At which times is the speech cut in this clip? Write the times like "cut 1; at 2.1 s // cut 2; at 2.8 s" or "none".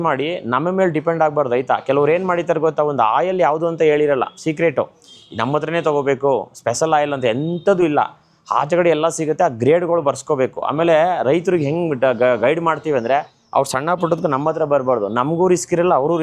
none